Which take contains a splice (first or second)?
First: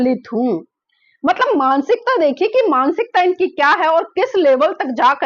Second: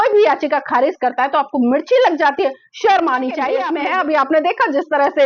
second